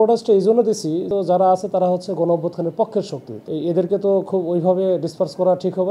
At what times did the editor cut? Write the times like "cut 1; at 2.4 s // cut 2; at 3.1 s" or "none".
cut 1; at 1.1 s // cut 2; at 3.4 s